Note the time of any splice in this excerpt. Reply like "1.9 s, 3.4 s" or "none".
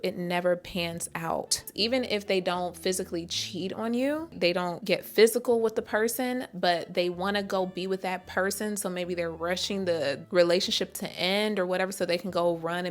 1.7 s, 4.3 s

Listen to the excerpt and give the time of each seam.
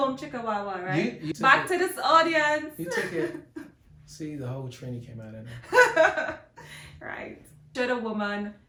none

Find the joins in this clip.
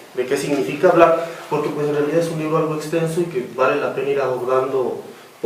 2.0 s

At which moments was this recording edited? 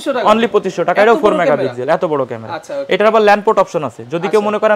none

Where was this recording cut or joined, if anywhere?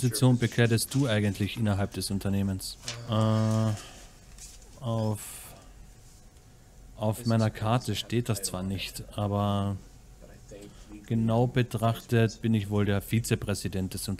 none

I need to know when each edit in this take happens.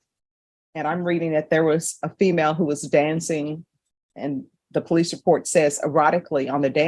none

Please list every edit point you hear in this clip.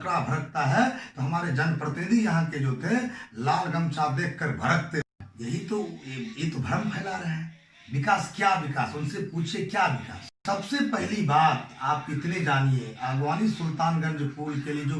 5.1 s, 10.4 s

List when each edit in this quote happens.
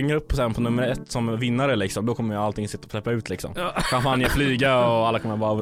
none

